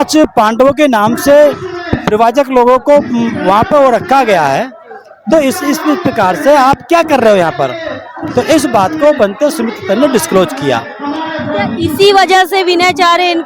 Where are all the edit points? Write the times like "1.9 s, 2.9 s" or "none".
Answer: none